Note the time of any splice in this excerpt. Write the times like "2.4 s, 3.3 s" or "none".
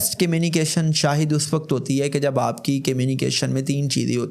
none

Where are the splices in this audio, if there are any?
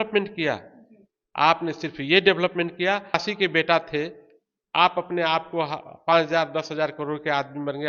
3.2 s

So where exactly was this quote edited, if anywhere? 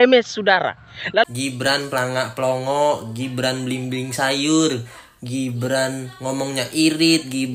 1.2 s

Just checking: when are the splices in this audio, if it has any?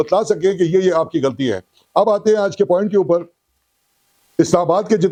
none

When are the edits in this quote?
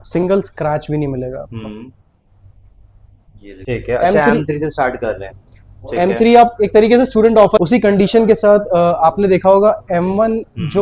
3.5 s, 7.6 s

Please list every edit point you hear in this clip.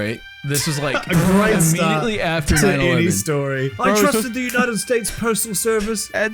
3.7 s

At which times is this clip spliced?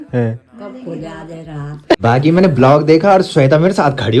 2.0 s

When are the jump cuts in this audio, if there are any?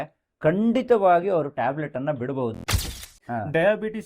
2.6 s

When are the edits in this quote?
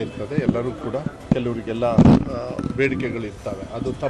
1.1 s

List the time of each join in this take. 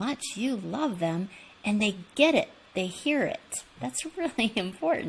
none

